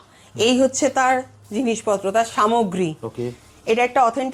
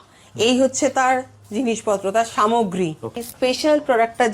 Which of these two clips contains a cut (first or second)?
second